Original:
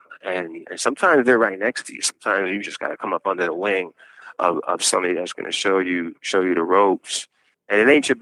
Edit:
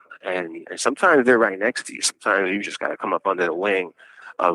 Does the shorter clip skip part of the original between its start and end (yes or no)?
no